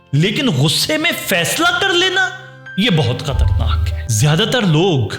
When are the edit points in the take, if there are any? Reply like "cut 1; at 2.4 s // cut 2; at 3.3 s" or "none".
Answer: cut 1; at 4.0 s